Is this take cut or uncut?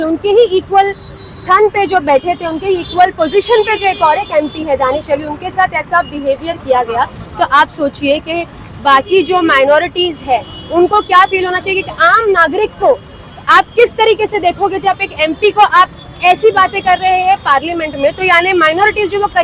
uncut